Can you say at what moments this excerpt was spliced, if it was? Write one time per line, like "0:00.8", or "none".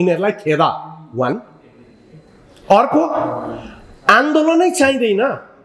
none

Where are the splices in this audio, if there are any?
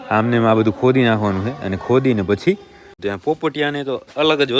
0:03.0

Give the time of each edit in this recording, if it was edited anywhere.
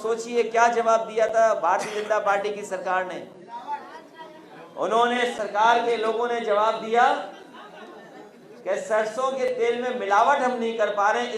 none

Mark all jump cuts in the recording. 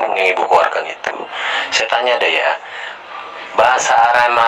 none

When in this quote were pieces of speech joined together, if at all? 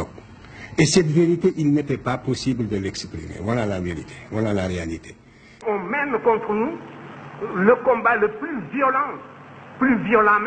0:05.6

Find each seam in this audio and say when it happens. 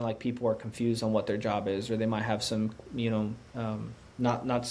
none

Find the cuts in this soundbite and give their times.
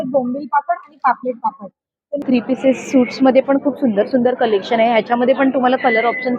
0:02.2

